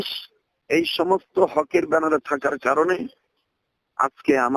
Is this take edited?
no; 0 cuts

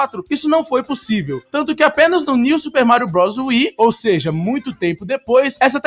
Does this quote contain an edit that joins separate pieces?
no; 0 cuts

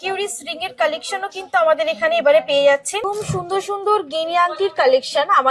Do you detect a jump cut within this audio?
yes; 1 cut; at 3.0 s

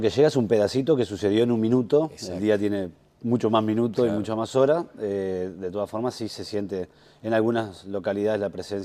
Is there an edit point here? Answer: yes; 1 cut; at 5.6 s

